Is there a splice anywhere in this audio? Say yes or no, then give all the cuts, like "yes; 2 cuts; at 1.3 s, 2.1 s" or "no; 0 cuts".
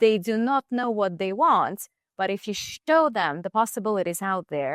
no; 0 cuts